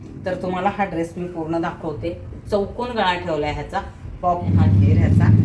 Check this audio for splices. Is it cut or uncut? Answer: cut